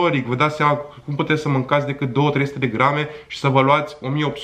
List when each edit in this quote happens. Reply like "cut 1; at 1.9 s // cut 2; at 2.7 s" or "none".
none